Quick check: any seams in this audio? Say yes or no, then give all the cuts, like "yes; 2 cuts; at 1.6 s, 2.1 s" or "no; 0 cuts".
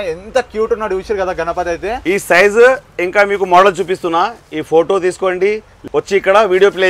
yes; 2 cuts; at 2.0 s, 5.7 s